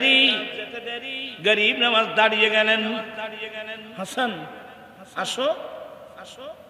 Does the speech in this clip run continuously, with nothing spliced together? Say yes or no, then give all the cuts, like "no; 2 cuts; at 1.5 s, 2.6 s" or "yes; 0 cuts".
no; 1 cut; at 3.8 s